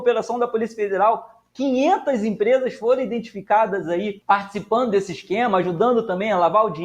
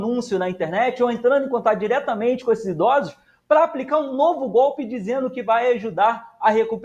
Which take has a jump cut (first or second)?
first